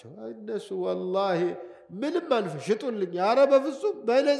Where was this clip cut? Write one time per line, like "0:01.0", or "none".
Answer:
none